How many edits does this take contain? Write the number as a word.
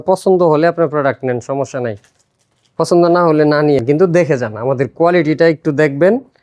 zero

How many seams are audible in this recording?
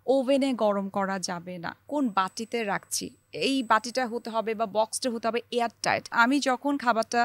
two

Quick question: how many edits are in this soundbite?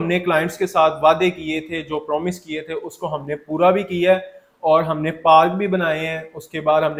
zero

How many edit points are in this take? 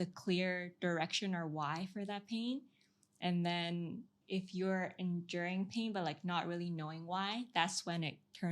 one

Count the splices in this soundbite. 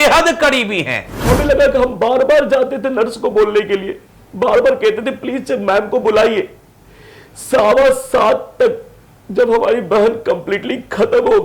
one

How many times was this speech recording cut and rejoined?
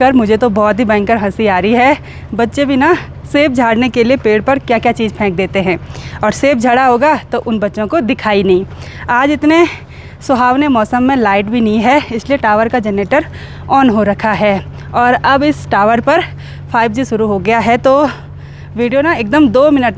zero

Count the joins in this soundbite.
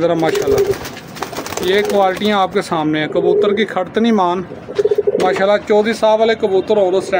zero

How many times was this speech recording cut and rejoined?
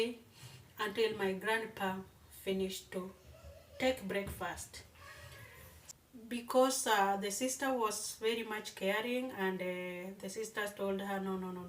one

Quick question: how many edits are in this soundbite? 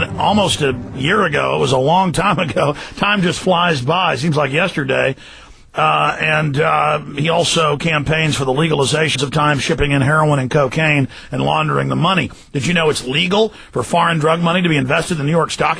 zero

